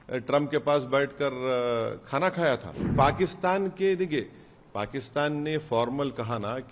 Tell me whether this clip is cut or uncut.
cut